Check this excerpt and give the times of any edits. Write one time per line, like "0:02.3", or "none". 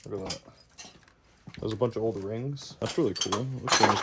0:02.7